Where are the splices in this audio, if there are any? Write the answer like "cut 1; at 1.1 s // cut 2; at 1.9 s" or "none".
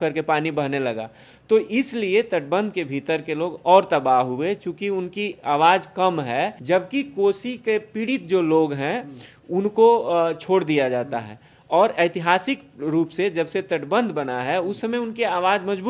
cut 1; at 6.6 s